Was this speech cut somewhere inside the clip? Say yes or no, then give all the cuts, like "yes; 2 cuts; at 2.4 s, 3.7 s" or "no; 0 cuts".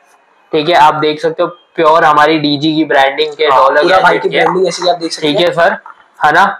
no; 0 cuts